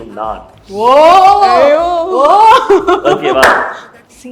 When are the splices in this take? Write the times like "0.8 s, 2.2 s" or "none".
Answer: none